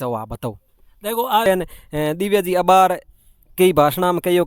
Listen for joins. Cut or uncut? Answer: cut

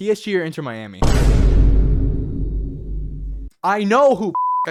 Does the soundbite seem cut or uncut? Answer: uncut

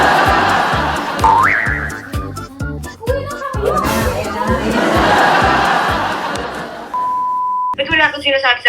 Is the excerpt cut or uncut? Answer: cut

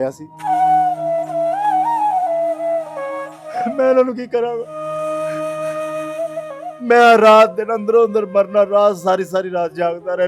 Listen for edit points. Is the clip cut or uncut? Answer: cut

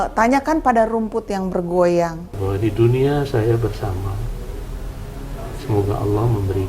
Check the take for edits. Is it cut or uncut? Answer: cut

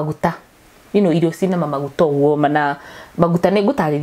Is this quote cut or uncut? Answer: uncut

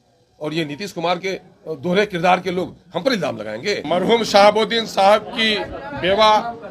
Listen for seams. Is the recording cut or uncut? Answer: cut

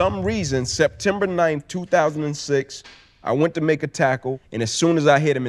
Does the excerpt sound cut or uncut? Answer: cut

